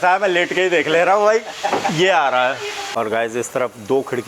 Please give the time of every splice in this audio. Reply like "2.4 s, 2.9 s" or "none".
2.8 s